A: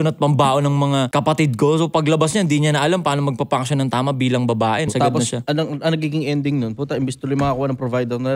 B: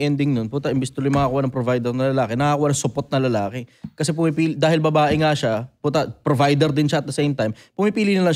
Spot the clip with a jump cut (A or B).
A